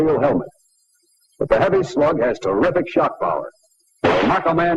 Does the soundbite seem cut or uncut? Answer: uncut